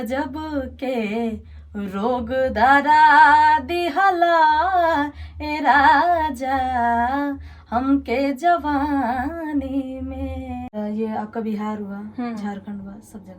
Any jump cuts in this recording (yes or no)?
yes